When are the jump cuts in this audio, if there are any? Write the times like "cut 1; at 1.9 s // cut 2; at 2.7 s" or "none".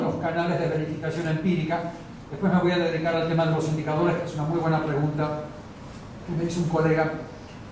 none